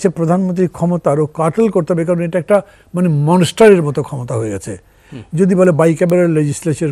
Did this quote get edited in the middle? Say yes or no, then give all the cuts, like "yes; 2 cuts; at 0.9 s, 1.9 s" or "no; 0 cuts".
no; 0 cuts